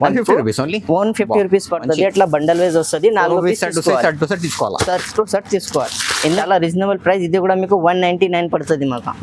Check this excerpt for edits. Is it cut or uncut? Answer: cut